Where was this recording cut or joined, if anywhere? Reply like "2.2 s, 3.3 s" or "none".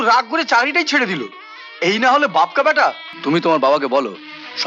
3.1 s